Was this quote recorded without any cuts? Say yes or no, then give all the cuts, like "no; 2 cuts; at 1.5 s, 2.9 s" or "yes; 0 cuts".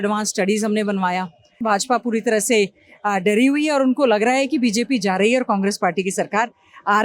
no; 1 cut; at 1.6 s